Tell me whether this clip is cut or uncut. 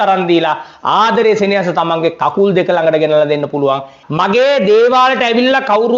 cut